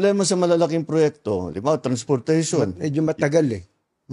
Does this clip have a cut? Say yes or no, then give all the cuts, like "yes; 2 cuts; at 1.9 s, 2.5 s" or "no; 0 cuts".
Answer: no; 0 cuts